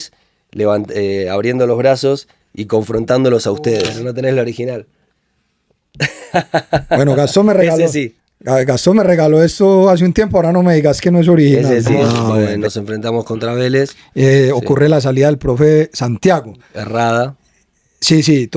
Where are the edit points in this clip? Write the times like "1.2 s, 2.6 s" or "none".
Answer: 3.9 s, 12.5 s